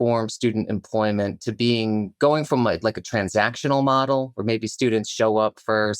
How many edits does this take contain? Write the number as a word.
zero